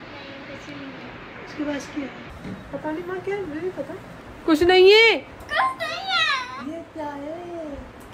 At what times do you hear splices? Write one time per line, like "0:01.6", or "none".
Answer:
0:04.1